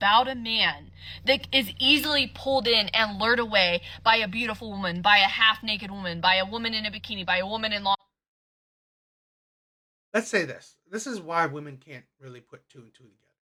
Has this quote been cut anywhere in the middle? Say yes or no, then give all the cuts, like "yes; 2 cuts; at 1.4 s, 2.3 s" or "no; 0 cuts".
no; 0 cuts